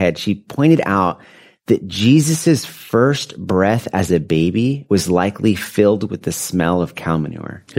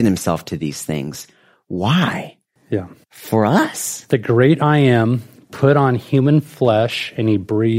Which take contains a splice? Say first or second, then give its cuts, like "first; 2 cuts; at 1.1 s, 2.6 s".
first; 1 cut; at 4.8 s